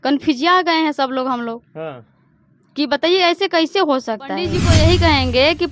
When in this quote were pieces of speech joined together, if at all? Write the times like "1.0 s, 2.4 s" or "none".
4.5 s